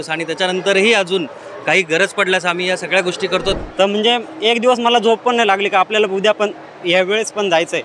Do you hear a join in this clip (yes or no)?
yes